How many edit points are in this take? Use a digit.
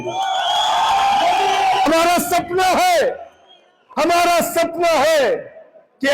1